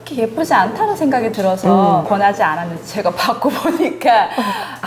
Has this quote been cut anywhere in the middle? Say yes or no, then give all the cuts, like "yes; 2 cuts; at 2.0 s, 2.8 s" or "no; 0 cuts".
yes; 1 cut; at 2.0 s